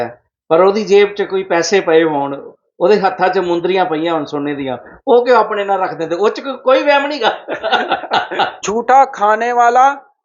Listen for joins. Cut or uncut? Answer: cut